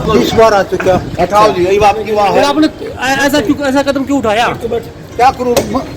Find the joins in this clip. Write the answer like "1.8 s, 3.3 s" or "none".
none